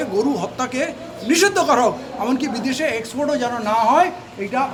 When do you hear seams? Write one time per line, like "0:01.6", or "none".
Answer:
none